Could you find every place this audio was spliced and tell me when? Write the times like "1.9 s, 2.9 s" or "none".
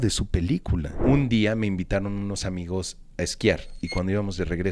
0.9 s, 3.7 s